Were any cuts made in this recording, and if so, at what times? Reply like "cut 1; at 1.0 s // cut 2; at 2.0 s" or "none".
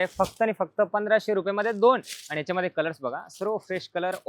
none